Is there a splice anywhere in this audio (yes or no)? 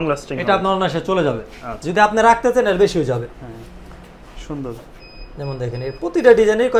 no